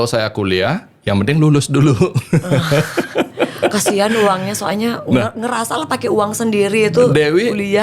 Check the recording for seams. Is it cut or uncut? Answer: uncut